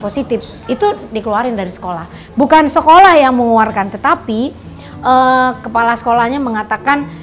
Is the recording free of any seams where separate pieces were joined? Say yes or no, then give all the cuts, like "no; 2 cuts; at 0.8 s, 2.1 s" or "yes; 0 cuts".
yes; 0 cuts